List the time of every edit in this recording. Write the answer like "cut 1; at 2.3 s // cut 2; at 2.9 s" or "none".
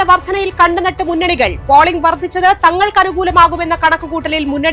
none